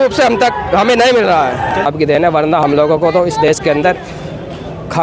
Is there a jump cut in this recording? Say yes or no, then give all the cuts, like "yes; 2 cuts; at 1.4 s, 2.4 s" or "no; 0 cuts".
yes; 1 cut; at 1.9 s